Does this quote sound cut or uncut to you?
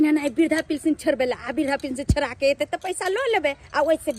uncut